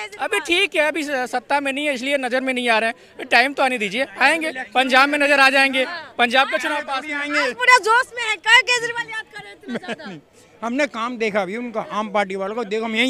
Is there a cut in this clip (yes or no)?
no